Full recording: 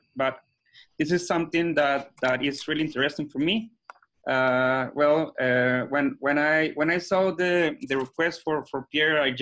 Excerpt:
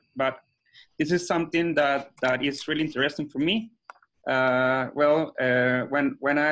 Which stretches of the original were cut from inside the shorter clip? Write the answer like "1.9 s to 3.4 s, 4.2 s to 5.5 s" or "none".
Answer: none